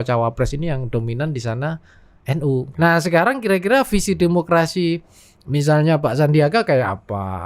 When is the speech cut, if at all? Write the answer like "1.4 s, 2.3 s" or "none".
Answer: 2.7 s